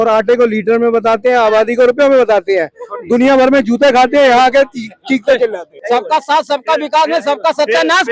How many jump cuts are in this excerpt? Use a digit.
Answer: 1